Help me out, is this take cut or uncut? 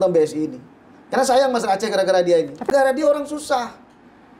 cut